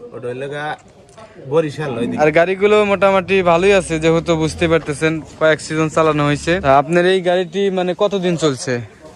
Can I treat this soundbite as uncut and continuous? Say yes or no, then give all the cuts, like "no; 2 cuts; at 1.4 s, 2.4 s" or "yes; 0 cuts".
no; 2 cuts; at 2.1 s, 6.6 s